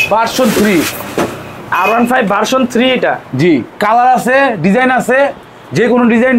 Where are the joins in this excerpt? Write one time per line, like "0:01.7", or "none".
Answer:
none